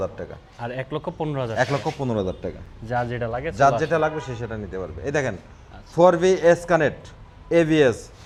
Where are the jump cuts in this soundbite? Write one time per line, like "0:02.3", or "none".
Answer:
none